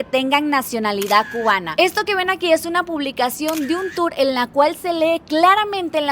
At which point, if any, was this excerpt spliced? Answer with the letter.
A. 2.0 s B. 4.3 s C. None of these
C